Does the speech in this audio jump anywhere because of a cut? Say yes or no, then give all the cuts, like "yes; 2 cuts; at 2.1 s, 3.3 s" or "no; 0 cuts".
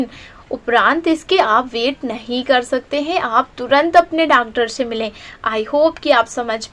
no; 0 cuts